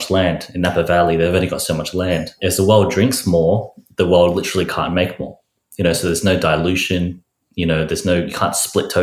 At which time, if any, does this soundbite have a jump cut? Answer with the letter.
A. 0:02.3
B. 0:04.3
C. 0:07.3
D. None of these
A